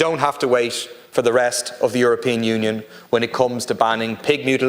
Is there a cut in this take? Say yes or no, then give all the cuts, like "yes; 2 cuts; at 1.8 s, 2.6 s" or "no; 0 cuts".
no; 0 cuts